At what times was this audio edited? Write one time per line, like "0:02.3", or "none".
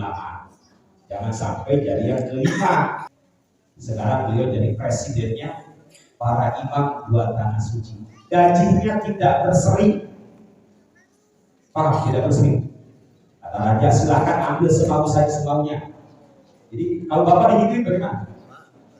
0:03.1